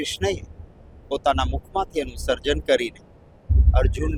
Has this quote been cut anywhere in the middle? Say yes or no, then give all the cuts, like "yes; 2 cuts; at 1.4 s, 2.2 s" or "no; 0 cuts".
no; 0 cuts